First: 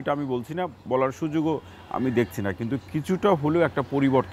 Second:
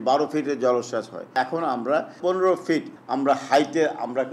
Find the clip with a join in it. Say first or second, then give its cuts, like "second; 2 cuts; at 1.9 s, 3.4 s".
second; 3 cuts; at 1.3 s, 2.2 s, 3.0 s